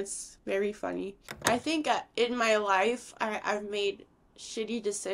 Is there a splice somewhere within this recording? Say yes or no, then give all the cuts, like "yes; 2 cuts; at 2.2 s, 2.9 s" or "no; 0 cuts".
yes; 1 cut; at 1.3 s